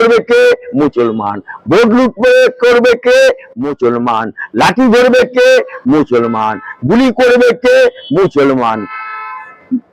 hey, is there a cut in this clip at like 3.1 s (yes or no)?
no